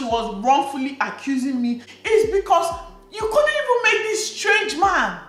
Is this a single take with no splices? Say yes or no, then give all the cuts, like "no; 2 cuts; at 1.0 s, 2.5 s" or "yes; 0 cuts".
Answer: yes; 0 cuts